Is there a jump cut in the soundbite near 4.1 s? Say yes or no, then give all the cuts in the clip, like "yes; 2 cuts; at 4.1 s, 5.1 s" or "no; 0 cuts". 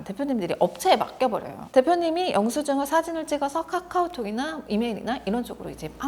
no; 1 cut; at 1.6 s